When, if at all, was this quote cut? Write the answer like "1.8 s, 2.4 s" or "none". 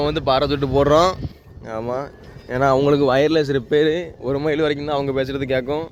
none